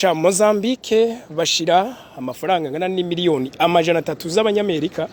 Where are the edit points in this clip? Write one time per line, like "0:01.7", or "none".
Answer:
none